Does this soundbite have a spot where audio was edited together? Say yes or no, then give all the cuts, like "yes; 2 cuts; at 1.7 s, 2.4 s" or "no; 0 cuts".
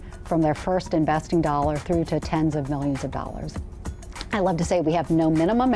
no; 0 cuts